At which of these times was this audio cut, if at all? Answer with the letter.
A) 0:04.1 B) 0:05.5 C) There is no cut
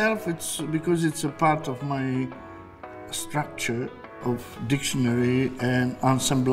C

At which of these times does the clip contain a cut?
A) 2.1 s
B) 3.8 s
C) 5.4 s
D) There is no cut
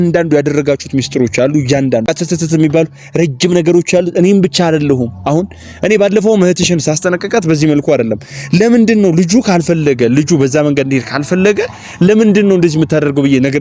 A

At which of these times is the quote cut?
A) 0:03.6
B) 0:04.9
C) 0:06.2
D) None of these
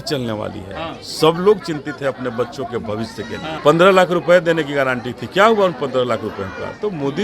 A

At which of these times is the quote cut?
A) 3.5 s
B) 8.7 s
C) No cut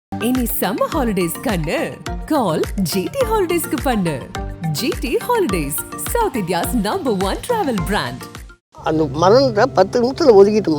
B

